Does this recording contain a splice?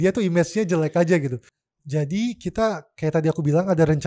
yes; 1 cut; at 1.4 s

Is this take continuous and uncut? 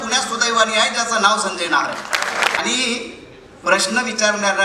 no; 1 cut; at 2.6 s

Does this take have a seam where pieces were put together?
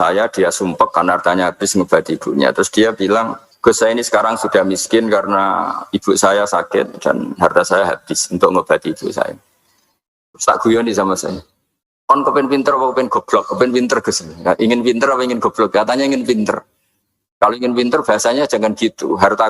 yes; 1 cut; at 3.4 s

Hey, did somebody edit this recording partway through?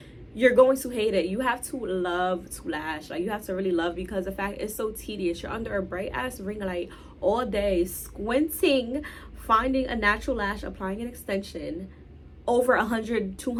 no; 0 cuts

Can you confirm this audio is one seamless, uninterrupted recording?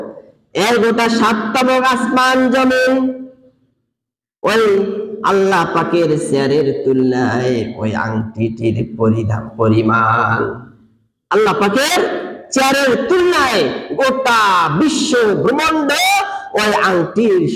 yes; 0 cuts

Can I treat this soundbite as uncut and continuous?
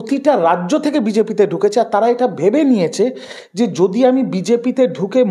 yes; 0 cuts

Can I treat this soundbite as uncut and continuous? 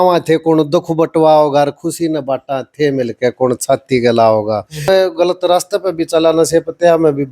no; 1 cut; at 4.9 s

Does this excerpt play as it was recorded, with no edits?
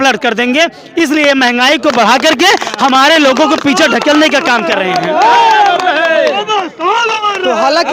yes; 0 cuts

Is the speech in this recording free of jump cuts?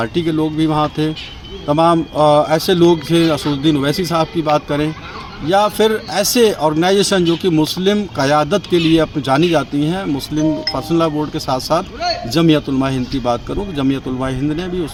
yes; 0 cuts

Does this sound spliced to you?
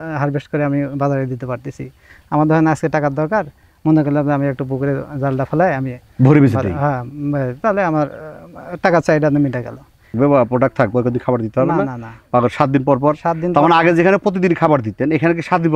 yes; 1 cut; at 10.1 s

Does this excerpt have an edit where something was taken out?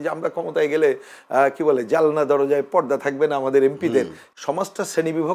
yes; 1 cut; at 4.2 s

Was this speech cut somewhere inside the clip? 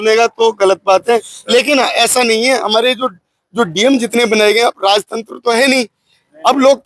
no; 0 cuts

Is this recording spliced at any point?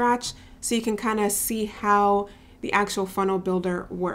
no; 0 cuts

